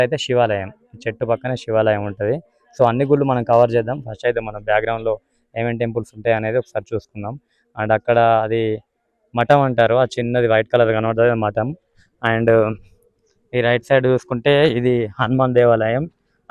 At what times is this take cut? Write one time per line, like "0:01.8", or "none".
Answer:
none